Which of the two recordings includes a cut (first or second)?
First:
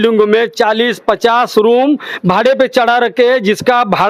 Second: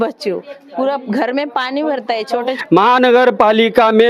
second